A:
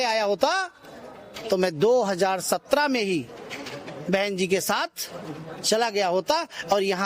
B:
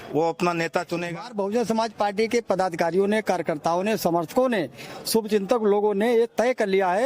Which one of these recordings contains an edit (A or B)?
B